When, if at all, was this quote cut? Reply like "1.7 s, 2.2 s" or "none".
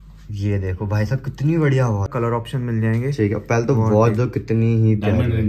2.1 s